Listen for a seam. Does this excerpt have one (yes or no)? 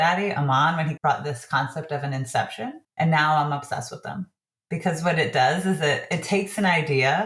yes